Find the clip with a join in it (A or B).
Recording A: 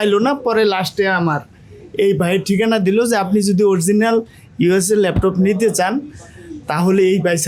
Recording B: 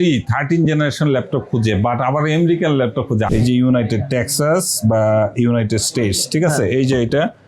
B